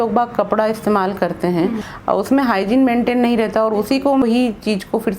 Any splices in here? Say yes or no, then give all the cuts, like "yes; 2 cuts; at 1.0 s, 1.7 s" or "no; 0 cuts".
yes; 2 cuts; at 1.9 s, 4.2 s